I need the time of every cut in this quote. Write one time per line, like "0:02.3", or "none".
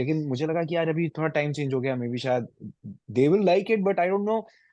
none